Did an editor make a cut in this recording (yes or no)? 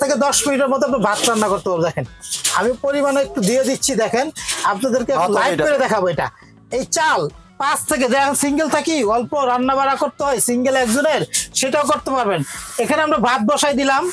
no